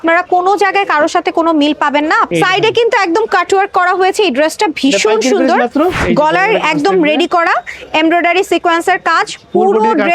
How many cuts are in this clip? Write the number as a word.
two